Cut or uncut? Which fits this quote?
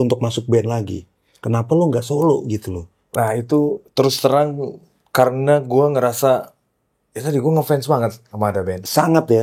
cut